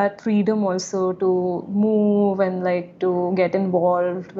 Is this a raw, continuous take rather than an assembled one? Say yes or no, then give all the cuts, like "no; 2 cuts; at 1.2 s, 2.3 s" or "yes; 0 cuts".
yes; 0 cuts